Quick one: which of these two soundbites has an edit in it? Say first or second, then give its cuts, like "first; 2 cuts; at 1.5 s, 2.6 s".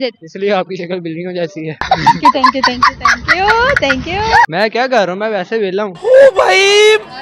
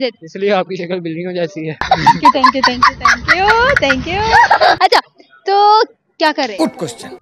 first; 1 cut; at 4.5 s